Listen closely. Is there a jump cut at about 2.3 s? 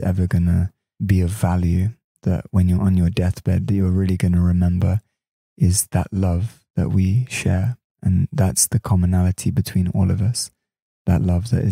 no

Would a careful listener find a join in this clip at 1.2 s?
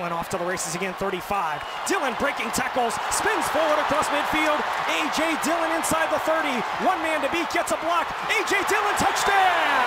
no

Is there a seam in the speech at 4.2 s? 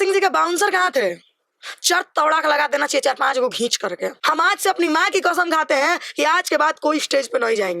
yes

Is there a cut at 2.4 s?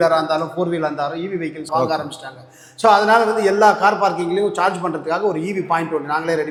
no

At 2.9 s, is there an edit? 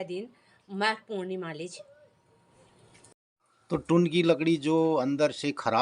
yes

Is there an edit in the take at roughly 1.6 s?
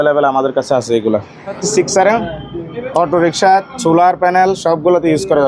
yes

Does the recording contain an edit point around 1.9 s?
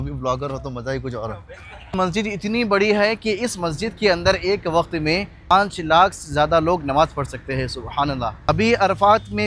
yes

